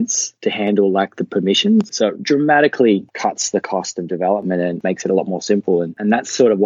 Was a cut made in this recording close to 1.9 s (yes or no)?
yes